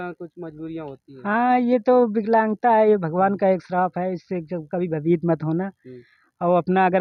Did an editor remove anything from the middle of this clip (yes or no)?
no